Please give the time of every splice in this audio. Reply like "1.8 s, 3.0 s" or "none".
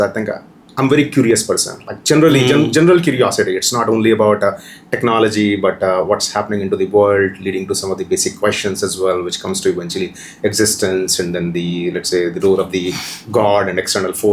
none